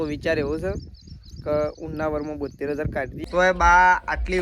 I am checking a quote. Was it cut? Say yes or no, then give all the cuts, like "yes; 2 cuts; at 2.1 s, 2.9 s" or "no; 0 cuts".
yes; 1 cut; at 3.1 s